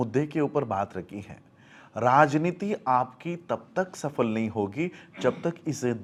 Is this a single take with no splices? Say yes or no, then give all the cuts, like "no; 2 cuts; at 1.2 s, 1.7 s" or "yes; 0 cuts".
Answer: yes; 0 cuts